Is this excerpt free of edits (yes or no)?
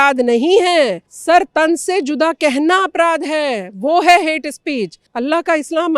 no